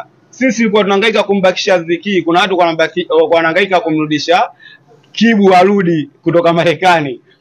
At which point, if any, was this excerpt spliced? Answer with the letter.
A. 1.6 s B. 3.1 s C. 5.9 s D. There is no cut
D